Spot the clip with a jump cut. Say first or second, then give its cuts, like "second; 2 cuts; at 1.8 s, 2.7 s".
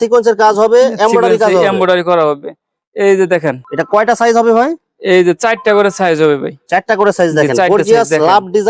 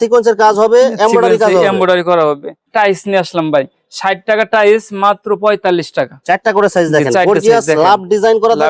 second; 2 cuts; at 2.5 s, 6.2 s